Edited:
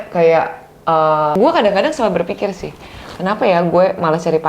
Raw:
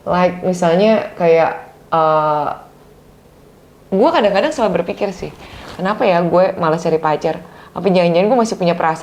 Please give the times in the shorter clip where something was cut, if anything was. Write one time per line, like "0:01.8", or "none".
0:01.3